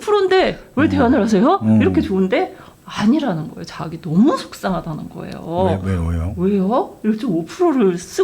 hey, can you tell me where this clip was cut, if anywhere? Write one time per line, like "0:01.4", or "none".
0:02.6